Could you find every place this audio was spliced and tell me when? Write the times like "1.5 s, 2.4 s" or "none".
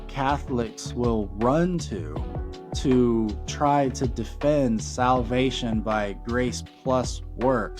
none